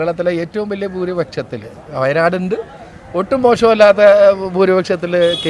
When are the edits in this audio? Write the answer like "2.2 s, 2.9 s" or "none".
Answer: none